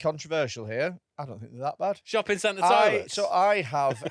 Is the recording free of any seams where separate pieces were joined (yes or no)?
no